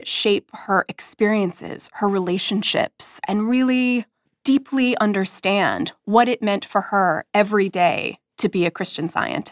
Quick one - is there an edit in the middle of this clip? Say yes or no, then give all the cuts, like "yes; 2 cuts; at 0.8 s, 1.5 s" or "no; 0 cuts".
yes; 1 cut; at 3.1 s